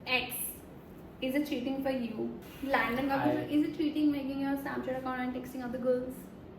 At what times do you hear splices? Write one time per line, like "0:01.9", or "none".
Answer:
0:02.5